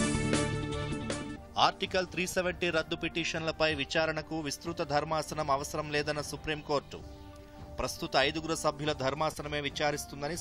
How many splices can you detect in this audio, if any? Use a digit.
1